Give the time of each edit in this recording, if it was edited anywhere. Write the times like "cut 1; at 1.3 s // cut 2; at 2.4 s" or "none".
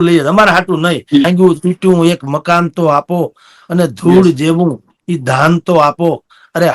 cut 1; at 1.3 s